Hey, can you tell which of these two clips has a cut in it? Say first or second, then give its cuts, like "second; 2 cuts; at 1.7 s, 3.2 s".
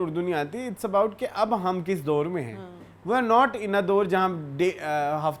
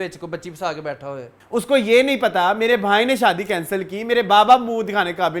second; 1 cut; at 1.3 s